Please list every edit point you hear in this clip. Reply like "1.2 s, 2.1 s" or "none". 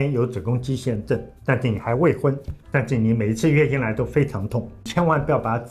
1.3 s, 2.5 s, 4.9 s